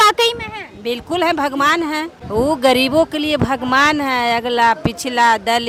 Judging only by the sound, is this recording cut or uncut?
uncut